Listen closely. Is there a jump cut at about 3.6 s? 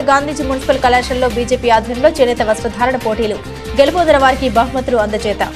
no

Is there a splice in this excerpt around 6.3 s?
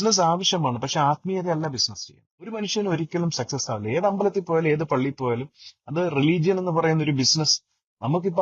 no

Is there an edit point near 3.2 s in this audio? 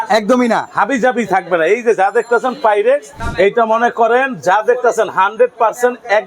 yes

